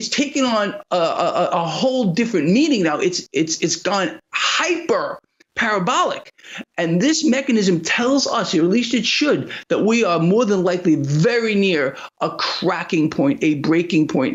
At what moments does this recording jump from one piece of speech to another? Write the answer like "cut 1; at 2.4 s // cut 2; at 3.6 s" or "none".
none